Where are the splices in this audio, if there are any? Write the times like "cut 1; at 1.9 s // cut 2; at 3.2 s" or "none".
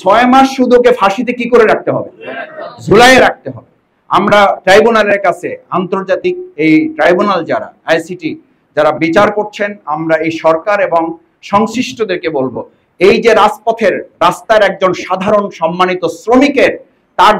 none